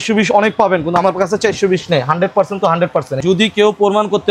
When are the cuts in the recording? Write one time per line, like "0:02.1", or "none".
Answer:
0:03.2